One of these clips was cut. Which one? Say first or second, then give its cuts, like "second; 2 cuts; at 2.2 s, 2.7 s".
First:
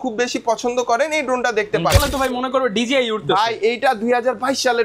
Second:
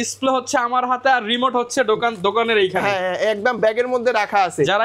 first; 1 cut; at 2.0 s